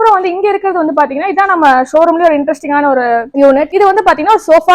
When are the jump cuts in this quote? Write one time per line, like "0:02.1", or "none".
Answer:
0:03.5